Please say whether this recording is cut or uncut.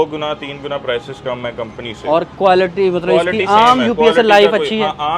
uncut